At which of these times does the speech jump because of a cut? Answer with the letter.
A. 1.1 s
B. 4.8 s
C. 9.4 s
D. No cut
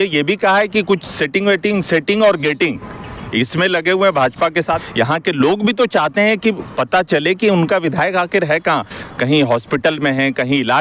B